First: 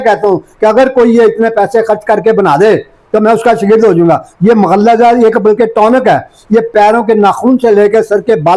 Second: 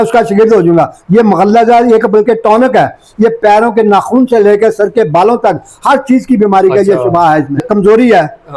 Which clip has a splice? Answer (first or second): second